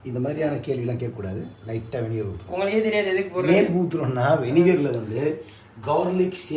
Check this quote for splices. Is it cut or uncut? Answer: cut